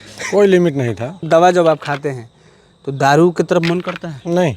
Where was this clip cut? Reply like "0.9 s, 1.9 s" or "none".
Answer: 1.3 s